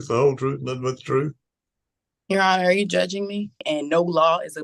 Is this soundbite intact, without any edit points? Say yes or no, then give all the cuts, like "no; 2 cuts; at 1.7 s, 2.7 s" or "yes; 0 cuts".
no; 1 cut; at 3.6 s